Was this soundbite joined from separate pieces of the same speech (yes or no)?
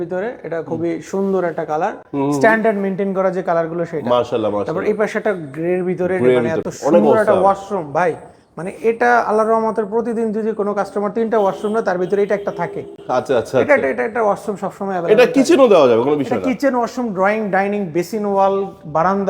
no